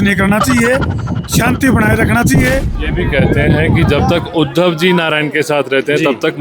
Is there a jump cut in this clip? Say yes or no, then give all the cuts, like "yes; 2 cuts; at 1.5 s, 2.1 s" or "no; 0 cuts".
yes; 1 cut; at 2.8 s